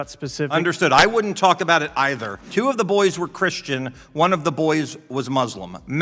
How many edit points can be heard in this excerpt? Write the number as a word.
one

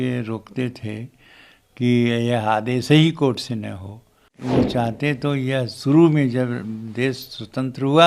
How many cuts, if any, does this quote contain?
one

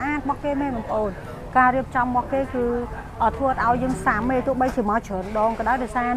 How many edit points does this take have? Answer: zero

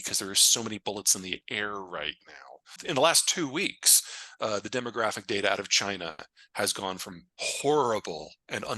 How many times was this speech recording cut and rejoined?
one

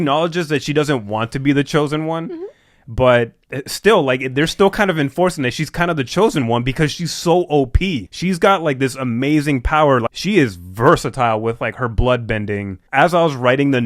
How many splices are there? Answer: two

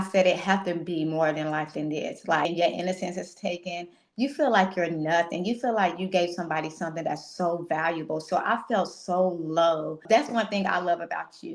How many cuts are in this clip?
two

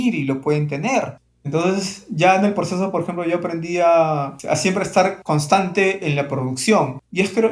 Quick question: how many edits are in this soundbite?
zero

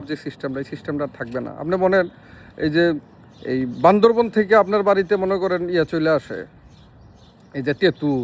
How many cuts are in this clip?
zero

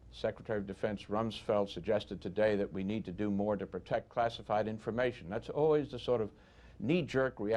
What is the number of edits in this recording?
zero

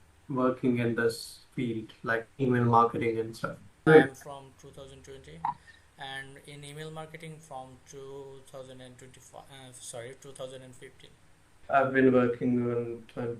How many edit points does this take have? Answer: two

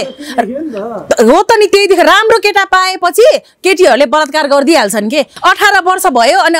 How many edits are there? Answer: one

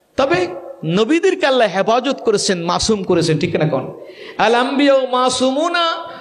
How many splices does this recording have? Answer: zero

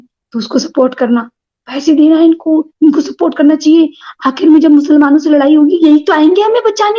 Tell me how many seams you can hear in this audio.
zero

